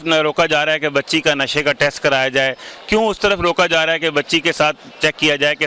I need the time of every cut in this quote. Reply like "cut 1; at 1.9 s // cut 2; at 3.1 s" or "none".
none